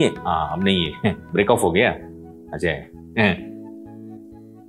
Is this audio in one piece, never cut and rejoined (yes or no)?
yes